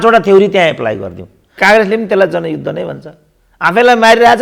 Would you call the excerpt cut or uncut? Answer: cut